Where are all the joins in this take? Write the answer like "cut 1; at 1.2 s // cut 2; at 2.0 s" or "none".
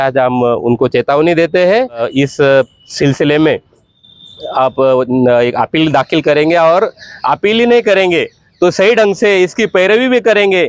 cut 1; at 2.1 s